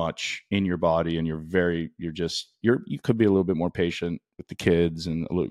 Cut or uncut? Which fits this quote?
uncut